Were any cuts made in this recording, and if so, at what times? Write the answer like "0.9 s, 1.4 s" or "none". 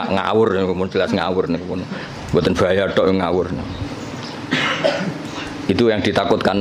none